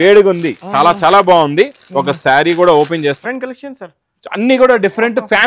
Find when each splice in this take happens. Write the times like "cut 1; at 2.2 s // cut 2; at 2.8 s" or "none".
cut 1; at 3.2 s